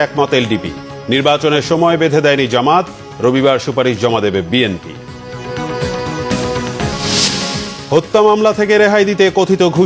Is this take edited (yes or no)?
no